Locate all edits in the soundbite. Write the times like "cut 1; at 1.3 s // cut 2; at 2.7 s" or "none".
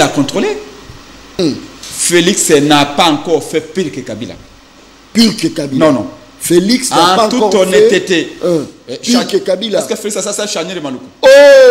cut 1; at 1.3 s